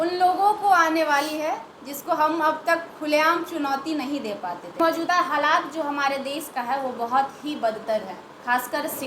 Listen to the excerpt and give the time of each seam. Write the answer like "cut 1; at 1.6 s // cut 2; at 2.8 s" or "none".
cut 1; at 4.8 s